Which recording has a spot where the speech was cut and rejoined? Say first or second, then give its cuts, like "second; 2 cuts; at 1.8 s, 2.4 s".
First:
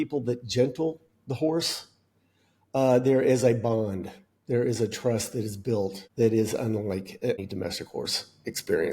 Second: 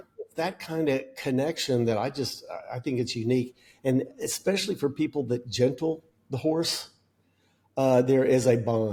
first; 2 cuts; at 6.0 s, 7.4 s